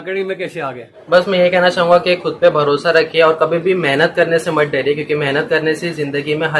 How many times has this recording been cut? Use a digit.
1